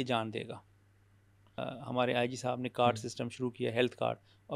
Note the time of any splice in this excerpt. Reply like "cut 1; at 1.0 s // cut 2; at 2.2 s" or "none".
cut 1; at 1.6 s